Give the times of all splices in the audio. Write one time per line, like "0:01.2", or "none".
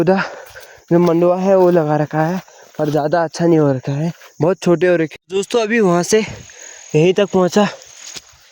0:05.1